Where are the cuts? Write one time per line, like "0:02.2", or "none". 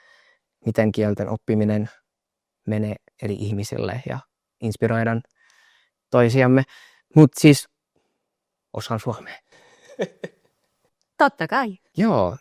none